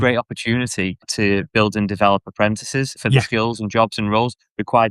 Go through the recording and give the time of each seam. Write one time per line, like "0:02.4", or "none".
0:01.1
0:03.0